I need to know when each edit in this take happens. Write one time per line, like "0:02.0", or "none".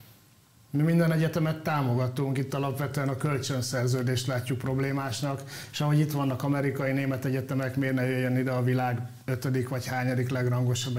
none